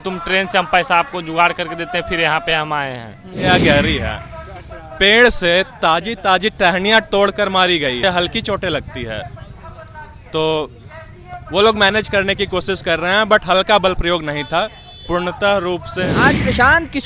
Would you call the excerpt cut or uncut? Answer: cut